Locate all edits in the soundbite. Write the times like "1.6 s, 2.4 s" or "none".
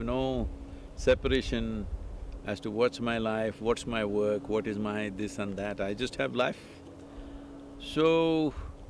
none